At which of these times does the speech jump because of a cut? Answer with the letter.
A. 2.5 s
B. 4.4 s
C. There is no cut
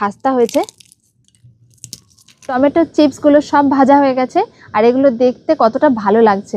A